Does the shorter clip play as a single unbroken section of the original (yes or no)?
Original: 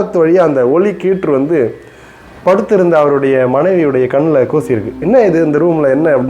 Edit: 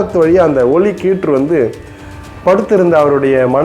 yes